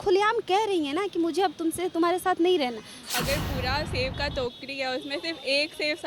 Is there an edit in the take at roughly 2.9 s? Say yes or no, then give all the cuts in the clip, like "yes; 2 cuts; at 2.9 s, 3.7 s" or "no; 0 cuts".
yes; 1 cut; at 2.9 s